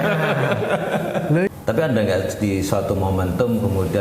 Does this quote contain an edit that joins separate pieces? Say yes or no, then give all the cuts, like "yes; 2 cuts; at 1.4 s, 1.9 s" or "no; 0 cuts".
yes; 1 cut; at 1.5 s